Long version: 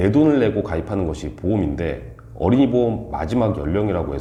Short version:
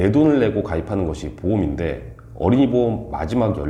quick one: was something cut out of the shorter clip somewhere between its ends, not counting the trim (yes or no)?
no